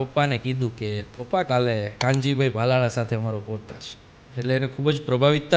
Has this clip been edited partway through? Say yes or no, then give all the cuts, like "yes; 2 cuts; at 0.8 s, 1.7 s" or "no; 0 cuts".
yes; 2 cuts; at 1.0 s, 1.9 s